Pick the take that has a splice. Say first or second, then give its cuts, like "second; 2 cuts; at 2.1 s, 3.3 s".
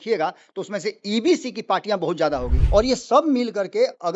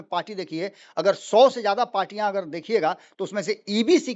first; 1 cut; at 2.5 s